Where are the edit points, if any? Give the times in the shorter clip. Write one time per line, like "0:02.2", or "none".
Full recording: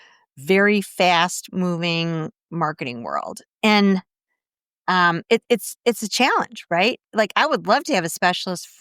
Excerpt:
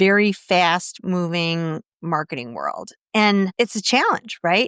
0:03.5